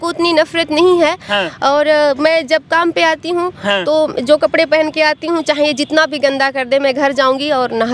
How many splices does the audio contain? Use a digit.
0